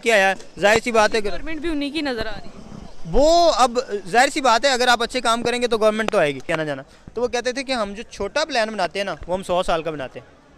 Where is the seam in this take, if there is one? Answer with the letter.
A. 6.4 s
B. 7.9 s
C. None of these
A